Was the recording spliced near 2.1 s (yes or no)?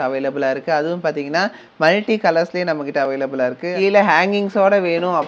no